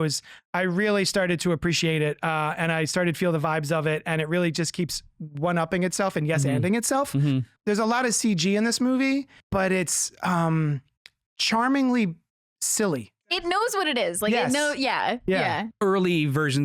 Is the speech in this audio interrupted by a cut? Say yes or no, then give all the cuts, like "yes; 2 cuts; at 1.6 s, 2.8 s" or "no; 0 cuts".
yes; 4 cuts; at 7.6 s, 9.4 s, 13.4 s, 15.7 s